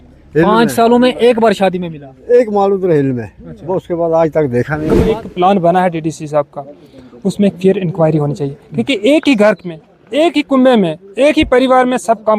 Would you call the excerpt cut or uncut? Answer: cut